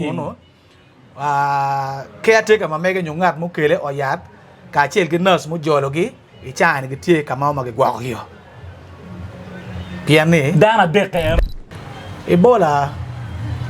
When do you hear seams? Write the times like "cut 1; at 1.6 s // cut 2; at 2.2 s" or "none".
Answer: cut 1; at 11.4 s